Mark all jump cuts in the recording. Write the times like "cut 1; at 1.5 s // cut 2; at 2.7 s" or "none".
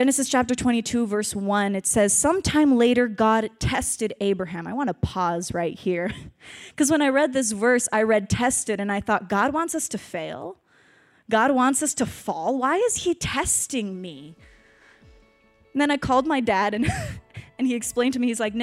none